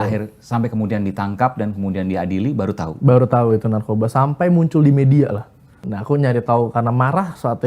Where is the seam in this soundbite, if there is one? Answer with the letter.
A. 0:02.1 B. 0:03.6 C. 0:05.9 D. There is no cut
C